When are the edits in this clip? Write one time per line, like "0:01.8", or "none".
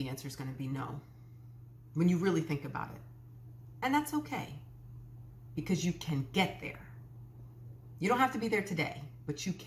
none